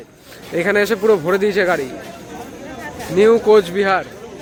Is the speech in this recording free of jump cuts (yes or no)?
yes